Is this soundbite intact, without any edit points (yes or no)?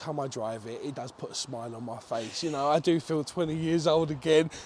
yes